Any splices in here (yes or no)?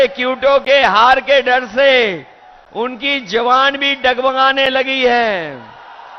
no